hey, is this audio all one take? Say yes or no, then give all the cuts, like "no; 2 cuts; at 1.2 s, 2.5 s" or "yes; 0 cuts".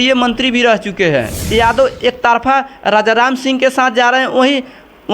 no; 1 cut; at 1.4 s